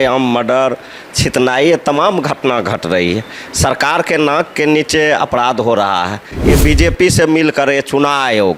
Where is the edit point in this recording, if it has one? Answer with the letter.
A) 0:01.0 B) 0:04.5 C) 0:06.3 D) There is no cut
C